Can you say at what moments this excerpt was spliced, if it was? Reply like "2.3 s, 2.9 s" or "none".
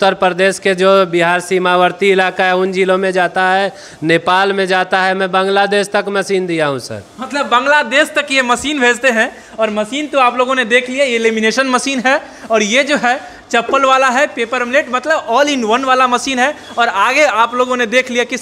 none